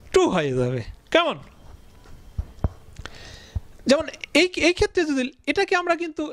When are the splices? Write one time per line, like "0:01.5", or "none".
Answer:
none